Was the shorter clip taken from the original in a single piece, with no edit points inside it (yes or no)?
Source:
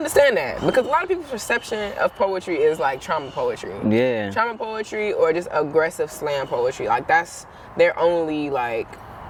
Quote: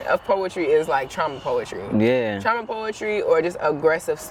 yes